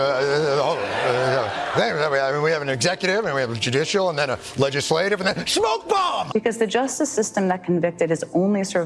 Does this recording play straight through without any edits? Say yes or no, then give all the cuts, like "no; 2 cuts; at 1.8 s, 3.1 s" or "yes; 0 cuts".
no; 1 cut; at 6.6 s